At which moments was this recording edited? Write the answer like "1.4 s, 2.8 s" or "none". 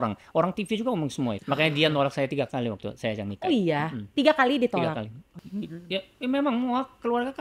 1.4 s, 5.4 s